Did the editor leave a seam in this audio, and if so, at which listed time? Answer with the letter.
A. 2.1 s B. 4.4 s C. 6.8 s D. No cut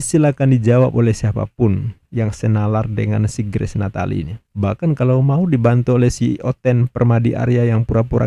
D